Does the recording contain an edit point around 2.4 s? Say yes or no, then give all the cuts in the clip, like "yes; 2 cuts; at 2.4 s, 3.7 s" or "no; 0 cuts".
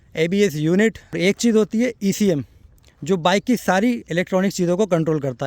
no; 1 cut; at 1.2 s